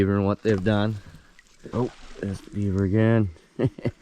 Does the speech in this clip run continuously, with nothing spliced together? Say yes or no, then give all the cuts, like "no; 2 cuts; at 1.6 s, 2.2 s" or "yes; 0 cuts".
no; 1 cut; at 1.6 s